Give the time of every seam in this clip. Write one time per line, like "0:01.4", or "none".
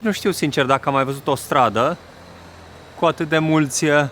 none